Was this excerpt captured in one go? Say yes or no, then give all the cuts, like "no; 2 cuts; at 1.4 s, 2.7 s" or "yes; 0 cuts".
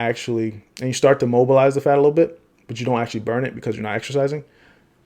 yes; 0 cuts